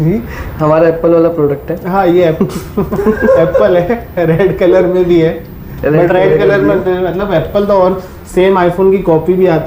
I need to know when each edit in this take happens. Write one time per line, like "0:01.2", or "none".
none